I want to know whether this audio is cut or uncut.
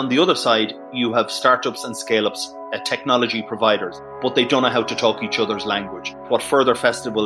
cut